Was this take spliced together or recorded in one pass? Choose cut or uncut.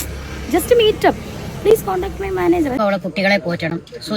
cut